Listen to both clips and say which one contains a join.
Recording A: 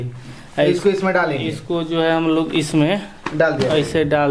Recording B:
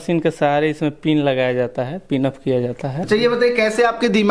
B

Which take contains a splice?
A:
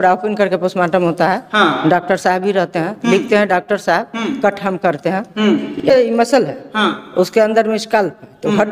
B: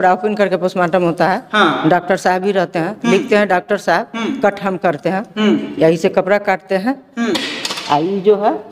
A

